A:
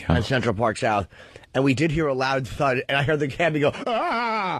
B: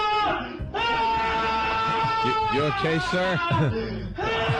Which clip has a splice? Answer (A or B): B